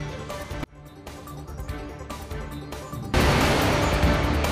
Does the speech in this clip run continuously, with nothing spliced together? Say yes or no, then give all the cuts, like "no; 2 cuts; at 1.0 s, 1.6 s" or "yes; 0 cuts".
no; 1 cut; at 2.4 s